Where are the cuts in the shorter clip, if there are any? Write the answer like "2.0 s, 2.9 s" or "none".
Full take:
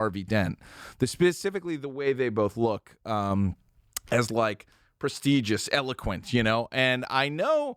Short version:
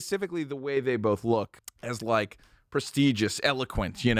1.6 s